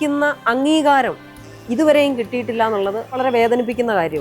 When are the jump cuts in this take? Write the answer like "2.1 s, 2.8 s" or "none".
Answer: 3.1 s